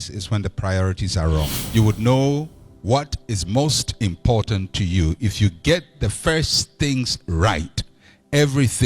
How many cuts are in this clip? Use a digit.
1